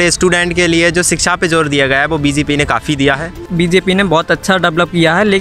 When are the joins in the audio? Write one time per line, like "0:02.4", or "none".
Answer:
0:03.4